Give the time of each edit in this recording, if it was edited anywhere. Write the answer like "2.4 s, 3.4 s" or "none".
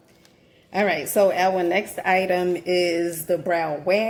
none